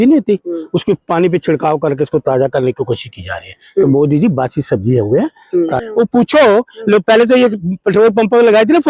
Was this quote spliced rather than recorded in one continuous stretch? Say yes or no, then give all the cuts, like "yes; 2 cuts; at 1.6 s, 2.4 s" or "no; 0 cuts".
yes; 1 cut; at 5.8 s